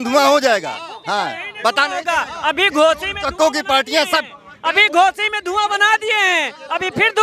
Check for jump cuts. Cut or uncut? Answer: uncut